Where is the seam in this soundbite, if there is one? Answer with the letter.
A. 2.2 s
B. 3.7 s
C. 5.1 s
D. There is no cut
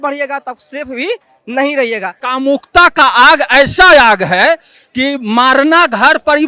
A